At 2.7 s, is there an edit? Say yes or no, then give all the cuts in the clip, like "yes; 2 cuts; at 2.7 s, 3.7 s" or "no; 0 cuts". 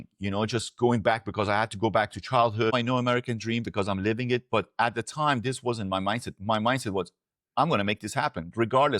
yes; 1 cut; at 2.7 s